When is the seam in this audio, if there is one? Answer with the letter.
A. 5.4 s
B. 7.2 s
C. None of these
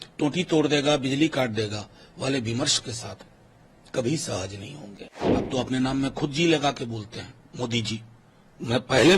A